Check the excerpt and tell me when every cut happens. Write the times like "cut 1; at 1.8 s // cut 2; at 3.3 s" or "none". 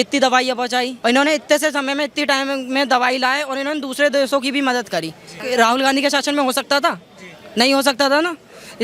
cut 1; at 0.9 s // cut 2; at 5.4 s